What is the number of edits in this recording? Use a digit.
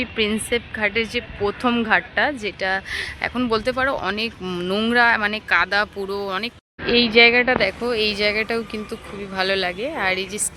1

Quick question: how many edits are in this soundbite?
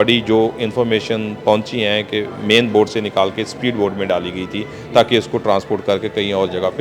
0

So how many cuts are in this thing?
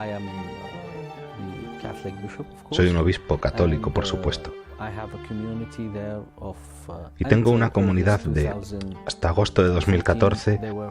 1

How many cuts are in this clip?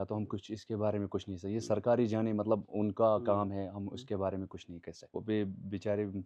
1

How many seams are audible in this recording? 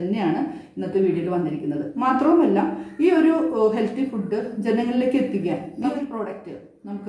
1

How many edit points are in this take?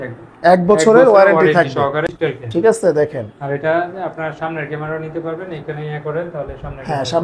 1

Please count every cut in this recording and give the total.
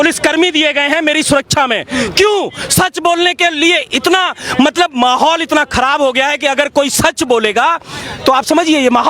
0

